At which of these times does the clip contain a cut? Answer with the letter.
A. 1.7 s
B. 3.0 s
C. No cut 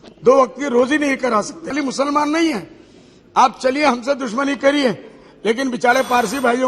A